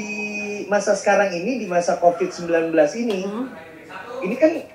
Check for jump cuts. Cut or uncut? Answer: uncut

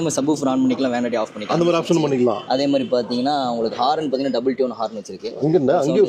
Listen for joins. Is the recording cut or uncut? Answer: uncut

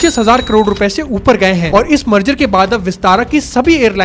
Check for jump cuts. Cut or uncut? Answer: cut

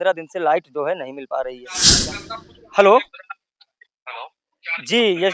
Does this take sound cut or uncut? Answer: cut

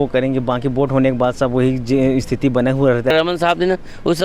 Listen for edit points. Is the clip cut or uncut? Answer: cut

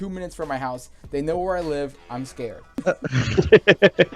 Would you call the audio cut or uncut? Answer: cut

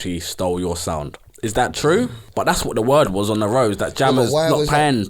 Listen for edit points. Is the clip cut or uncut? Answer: cut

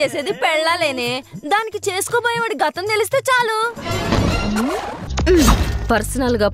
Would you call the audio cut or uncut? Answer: uncut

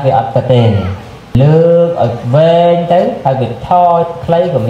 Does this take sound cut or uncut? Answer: cut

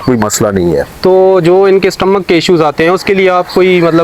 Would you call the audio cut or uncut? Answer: uncut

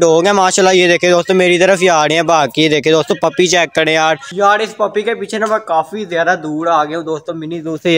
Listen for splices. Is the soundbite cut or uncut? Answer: uncut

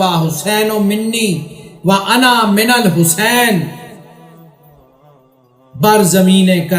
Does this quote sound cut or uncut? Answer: cut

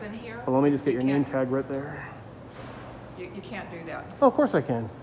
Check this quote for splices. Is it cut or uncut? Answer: uncut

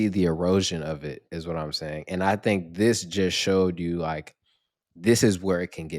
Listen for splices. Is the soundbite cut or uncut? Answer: uncut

